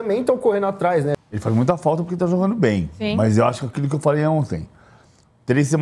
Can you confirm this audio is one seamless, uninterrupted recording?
no; 1 cut; at 1.1 s

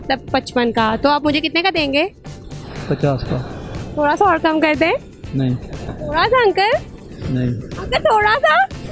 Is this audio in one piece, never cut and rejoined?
yes; 0 cuts

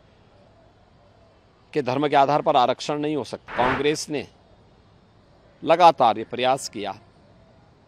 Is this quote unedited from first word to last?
no; 1 cut; at 3.4 s

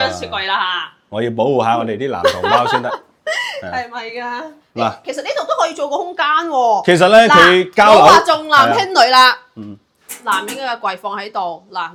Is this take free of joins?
yes; 0 cuts

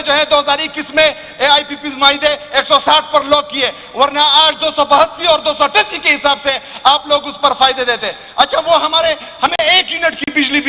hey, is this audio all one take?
yes; 0 cuts

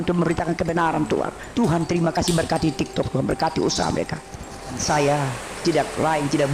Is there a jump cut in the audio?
yes; 2 cuts; at 1.4 s, 4.8 s

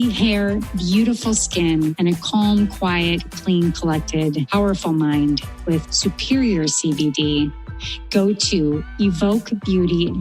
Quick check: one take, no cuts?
yes; 0 cuts

